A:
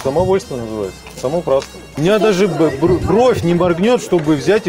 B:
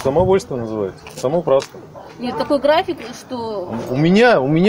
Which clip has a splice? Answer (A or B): A